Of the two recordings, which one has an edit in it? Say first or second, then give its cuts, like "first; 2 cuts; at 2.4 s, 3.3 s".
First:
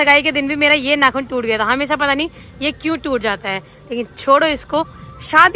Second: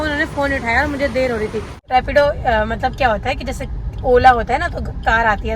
second; 1 cut; at 1.8 s